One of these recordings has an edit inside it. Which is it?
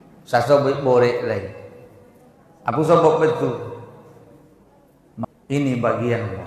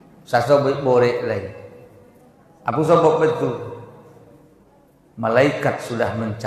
first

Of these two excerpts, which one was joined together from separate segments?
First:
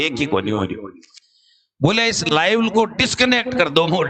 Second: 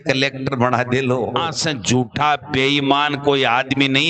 second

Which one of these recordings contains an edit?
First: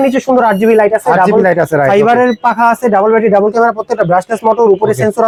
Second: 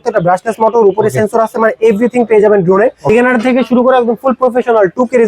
second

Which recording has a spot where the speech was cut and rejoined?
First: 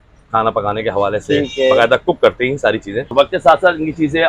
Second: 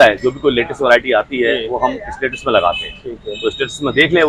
first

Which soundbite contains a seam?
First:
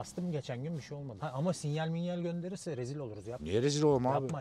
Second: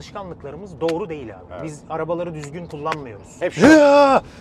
second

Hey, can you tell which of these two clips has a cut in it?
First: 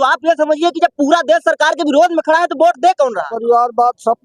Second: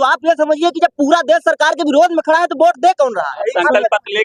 first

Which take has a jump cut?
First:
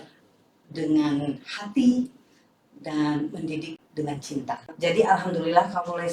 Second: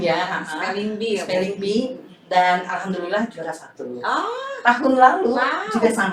first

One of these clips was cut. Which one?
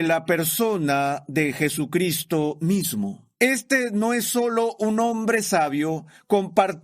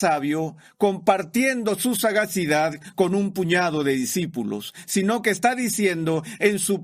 first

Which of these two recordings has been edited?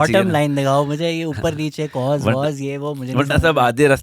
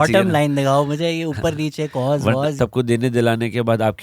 second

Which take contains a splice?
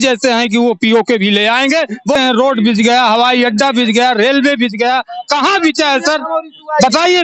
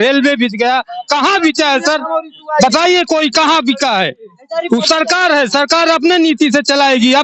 first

